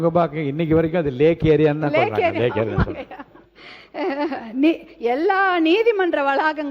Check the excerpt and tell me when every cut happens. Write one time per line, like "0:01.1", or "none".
none